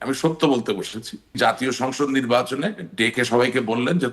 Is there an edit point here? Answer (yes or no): yes